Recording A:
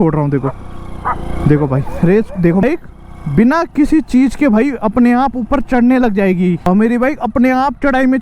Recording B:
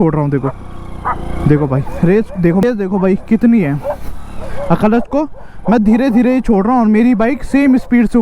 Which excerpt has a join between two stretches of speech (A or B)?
A